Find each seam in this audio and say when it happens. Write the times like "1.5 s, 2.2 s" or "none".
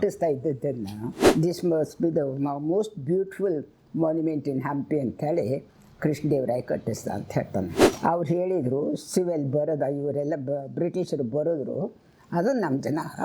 1.1 s, 7.8 s